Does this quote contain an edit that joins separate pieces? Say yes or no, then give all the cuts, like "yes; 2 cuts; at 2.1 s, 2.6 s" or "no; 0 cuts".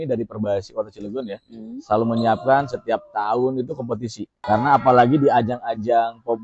yes; 1 cut; at 4.4 s